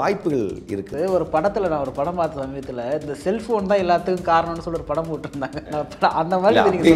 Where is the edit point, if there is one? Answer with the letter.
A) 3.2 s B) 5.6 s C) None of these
B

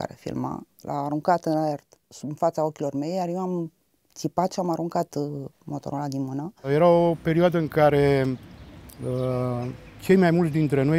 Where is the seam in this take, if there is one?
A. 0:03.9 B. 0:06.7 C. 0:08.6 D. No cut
B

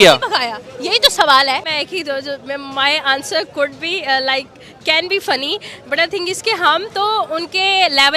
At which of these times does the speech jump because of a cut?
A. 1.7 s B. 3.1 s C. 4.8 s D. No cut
A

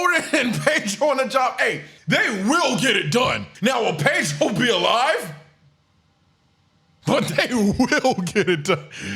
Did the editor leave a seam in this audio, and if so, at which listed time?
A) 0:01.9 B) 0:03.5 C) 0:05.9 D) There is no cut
A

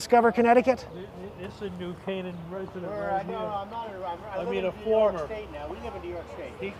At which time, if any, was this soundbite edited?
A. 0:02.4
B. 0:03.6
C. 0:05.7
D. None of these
D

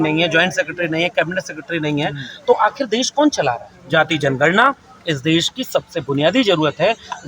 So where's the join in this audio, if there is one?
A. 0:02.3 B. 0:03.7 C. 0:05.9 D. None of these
B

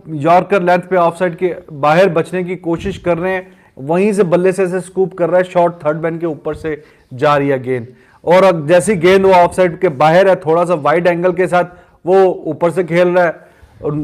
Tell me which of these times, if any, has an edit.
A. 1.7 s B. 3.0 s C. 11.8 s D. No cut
D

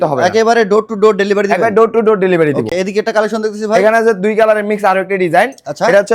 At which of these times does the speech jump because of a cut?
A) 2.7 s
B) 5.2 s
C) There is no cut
C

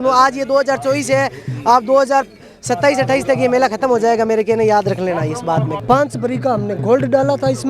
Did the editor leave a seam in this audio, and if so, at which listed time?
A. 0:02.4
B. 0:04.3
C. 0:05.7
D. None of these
C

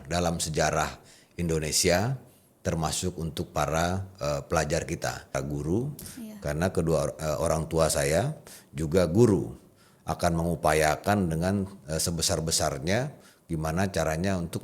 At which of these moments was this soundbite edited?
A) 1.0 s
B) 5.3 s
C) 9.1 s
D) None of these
B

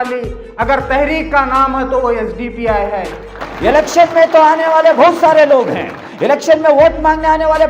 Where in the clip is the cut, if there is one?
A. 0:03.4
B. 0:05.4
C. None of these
A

